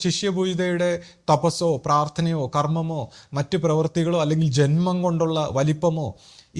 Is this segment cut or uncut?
uncut